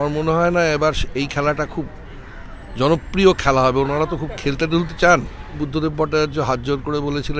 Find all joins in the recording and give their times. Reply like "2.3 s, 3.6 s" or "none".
5.5 s